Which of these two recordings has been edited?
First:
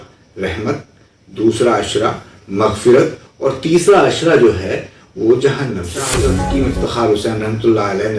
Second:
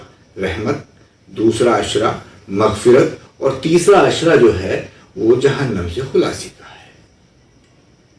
first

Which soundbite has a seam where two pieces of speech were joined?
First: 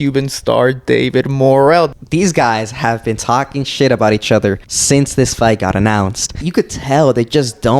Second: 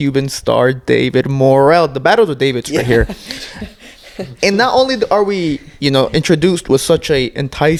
first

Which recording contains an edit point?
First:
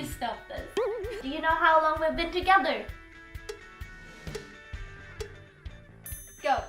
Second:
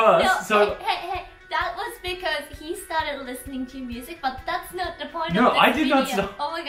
first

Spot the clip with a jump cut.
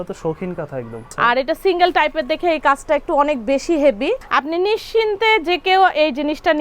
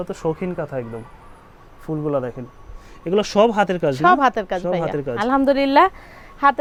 first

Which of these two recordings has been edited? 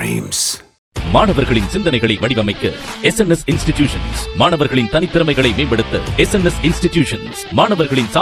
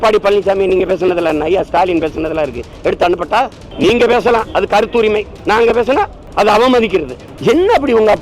second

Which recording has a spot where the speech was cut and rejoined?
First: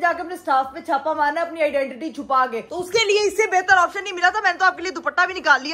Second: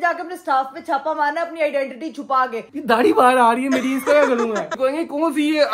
second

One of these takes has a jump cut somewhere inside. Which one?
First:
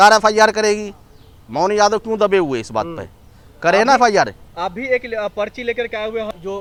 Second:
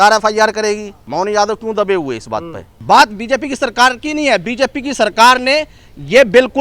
second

